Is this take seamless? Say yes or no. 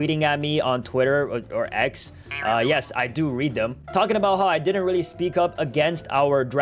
yes